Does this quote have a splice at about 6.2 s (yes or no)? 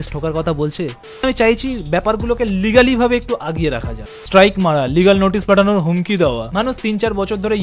no